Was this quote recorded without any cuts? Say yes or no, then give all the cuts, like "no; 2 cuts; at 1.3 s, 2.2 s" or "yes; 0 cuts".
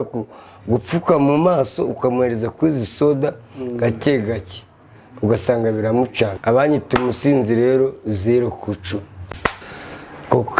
no; 2 cuts; at 6.4 s, 9.7 s